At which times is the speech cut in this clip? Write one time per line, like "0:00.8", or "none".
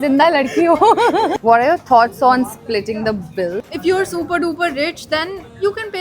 0:01.4
0:03.7